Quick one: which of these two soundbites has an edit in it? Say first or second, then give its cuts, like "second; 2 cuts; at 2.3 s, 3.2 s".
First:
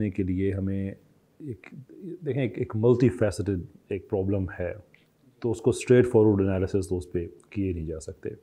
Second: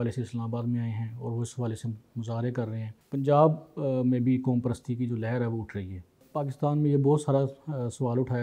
second; 2 cuts; at 2.9 s, 6.2 s